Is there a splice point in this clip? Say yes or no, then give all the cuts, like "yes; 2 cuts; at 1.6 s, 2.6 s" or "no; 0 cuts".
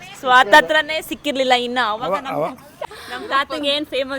yes; 1 cut; at 2.7 s